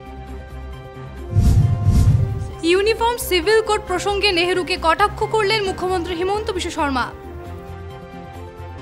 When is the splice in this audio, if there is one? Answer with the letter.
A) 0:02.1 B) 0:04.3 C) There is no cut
A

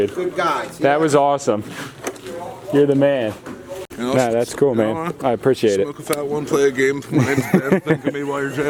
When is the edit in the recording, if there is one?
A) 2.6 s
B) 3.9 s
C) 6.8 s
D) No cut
D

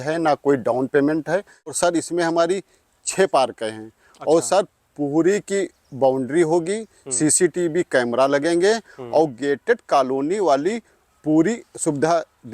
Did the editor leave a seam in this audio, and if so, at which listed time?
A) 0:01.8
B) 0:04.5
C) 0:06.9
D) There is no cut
A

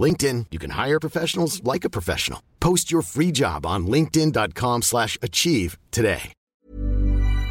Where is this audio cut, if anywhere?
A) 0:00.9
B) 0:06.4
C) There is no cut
B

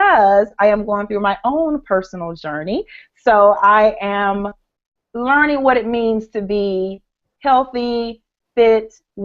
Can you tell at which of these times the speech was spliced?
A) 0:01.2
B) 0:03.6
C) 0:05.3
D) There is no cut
B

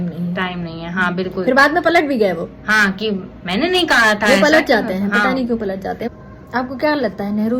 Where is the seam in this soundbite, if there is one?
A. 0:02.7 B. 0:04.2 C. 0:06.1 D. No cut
C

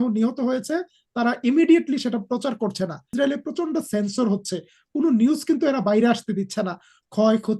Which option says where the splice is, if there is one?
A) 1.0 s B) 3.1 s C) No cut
B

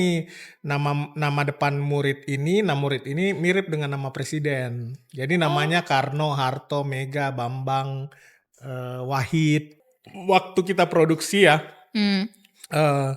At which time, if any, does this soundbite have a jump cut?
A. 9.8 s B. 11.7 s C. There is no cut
A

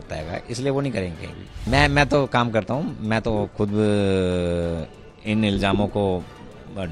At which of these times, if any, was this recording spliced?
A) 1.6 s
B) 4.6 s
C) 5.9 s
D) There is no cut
A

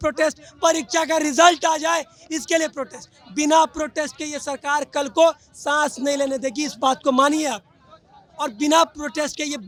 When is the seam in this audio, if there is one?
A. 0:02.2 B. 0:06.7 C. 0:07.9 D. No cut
D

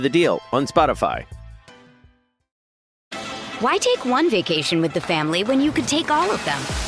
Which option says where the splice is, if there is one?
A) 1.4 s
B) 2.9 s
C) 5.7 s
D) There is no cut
B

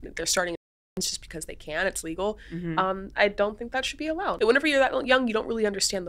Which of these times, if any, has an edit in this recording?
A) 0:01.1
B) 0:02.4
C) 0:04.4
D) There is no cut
C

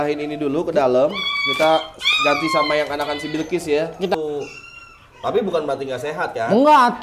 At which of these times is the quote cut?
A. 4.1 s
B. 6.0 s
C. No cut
A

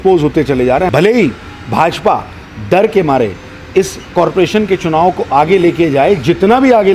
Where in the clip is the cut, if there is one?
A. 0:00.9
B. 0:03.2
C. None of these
A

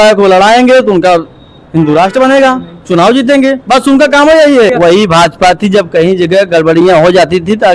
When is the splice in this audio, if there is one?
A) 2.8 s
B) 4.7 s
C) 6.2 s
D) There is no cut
B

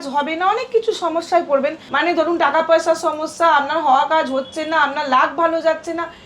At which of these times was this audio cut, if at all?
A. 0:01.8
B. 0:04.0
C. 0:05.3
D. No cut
A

